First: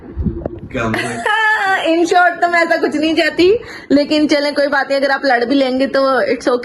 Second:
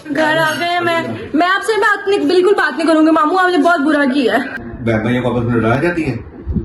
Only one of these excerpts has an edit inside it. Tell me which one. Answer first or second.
second